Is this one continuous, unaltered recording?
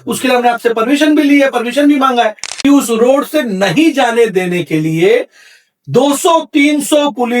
no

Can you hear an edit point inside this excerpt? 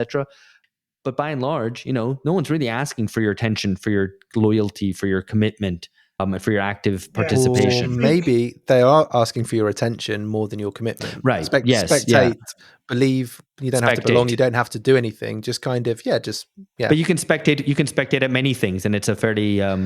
no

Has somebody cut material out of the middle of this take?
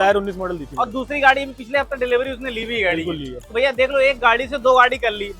yes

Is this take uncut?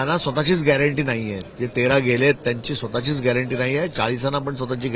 yes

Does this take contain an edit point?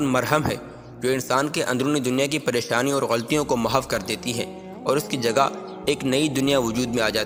no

